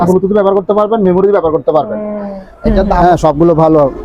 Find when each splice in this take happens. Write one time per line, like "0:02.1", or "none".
0:03.0